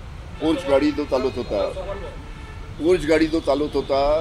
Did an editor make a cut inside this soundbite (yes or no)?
no